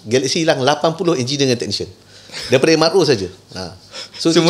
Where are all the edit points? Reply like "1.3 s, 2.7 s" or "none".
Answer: none

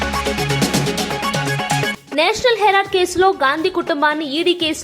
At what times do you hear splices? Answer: 1.9 s

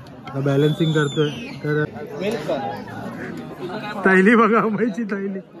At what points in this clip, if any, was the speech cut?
1.9 s

